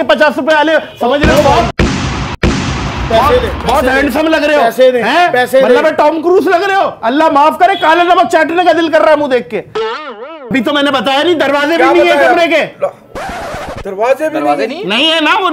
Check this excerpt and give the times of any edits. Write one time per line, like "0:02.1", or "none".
0:10.5